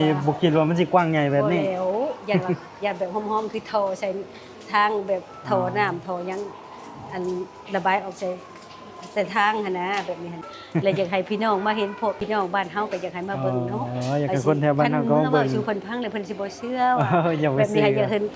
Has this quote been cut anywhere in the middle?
yes; 2 cuts; at 10.5 s, 12.2 s

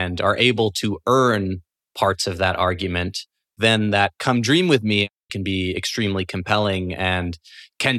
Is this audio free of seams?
no; 2 cuts; at 3.6 s, 5.3 s

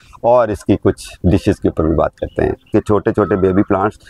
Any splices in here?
yes; 2 cuts; at 1.1 s, 2.6 s

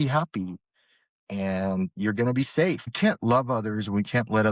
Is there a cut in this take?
yes; 1 cut; at 2.9 s

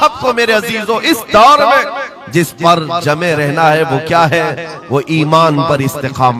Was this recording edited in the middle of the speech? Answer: no; 0 cuts

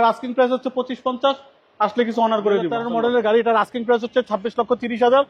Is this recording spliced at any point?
yes; 1 cut; at 2.9 s

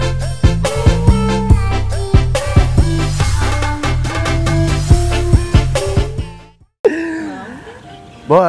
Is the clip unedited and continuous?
yes; 0 cuts

